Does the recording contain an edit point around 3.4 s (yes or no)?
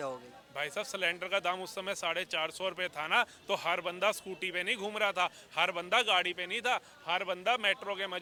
no